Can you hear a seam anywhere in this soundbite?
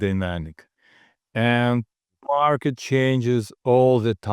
no; 0 cuts

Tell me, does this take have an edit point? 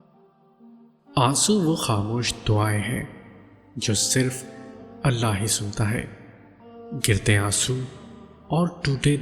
yes; 1 cut; at 1.2 s

